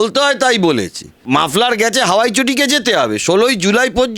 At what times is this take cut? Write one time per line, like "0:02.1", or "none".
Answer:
0:01.2